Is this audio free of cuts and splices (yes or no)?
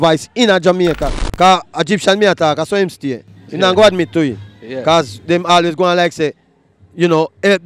no